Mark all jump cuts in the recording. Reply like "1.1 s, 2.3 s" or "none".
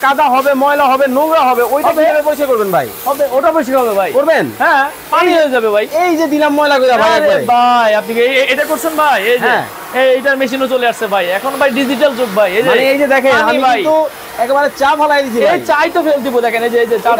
none